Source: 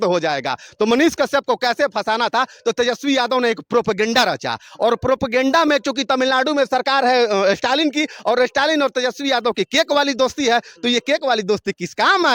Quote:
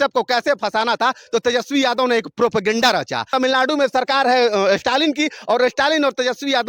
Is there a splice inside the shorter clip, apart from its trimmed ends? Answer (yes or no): yes